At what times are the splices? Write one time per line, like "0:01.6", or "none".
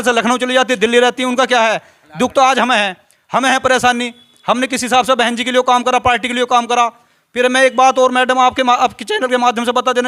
none

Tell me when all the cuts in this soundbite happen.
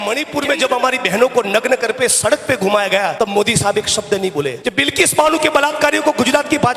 0:03.1
0:04.6

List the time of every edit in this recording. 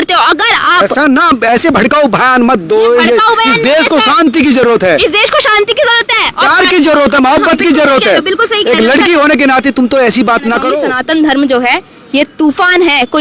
0:10.9

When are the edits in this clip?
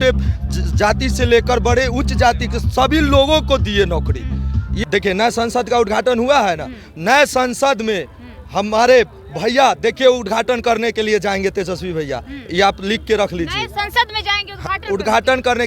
0:04.8

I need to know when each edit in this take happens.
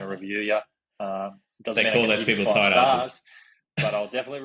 none

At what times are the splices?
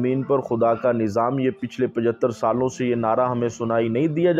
none

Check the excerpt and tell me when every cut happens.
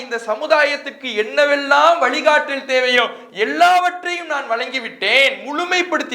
none

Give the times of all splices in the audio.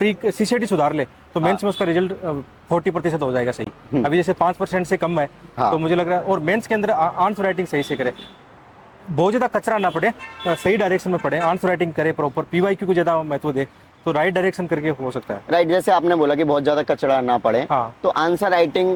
none

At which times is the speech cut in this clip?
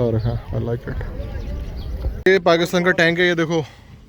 0:02.2

